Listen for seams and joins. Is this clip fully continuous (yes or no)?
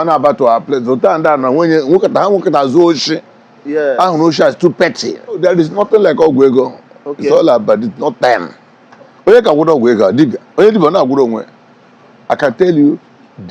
no